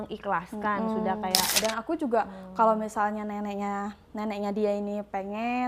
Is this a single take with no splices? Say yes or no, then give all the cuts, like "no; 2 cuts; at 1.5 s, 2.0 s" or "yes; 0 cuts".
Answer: no; 1 cut; at 1.5 s